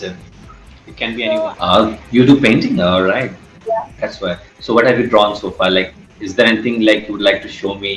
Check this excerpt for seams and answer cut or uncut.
cut